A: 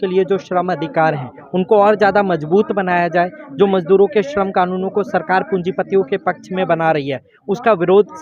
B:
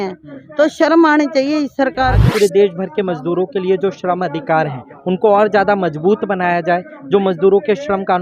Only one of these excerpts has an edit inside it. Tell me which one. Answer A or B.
B